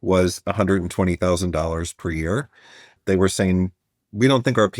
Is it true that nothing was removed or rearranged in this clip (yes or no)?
no